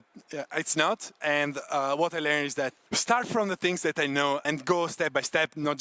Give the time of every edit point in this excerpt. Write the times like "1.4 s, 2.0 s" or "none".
1.2 s, 2.8 s, 4.4 s